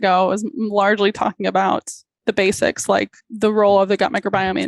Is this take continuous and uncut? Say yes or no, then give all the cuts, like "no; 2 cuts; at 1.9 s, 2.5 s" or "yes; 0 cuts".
no; 2 cuts; at 2.2 s, 3.2 s